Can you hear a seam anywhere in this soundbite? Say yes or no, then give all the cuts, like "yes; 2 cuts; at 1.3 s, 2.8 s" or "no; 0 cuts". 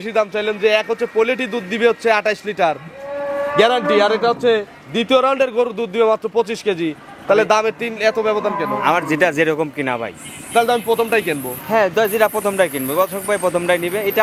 no; 0 cuts